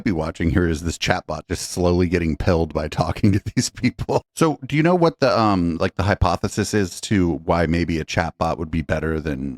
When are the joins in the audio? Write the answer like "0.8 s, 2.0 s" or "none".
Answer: 4.2 s